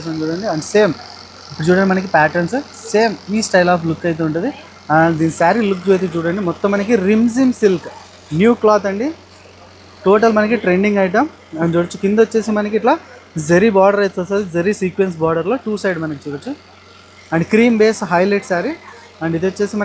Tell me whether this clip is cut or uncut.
uncut